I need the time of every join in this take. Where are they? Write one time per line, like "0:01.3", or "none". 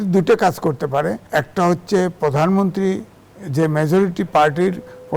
0:01.2